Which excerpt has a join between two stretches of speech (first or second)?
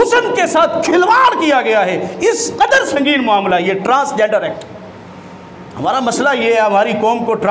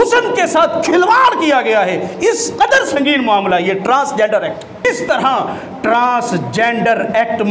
second